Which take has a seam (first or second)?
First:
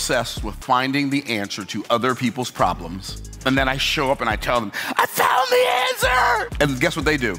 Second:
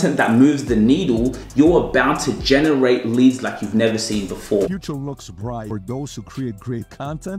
second